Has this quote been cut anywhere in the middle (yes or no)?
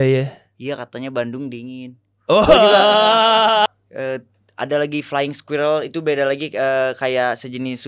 yes